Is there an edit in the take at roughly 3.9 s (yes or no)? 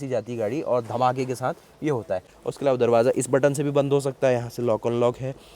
no